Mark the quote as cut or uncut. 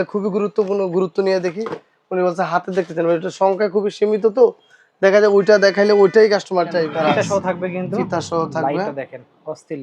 cut